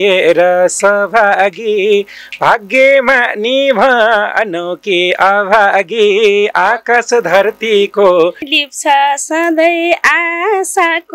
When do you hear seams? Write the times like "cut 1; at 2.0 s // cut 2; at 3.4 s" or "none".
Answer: cut 1; at 8.6 s